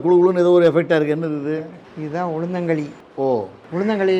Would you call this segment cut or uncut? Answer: uncut